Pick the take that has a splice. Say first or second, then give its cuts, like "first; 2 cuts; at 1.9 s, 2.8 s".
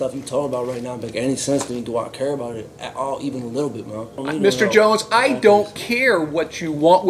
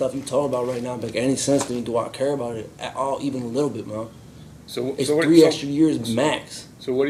first; 1 cut; at 4.2 s